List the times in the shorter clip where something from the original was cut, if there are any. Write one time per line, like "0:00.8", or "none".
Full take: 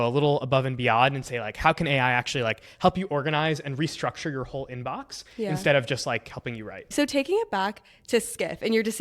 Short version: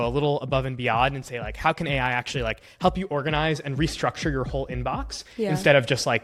none